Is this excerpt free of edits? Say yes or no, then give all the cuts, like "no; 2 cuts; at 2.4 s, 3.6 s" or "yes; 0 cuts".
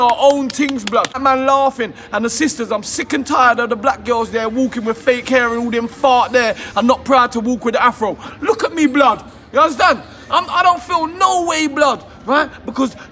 no; 1 cut; at 1.1 s